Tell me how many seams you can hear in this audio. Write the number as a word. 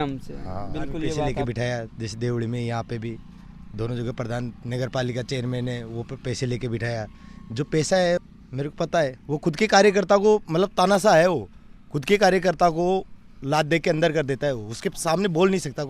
two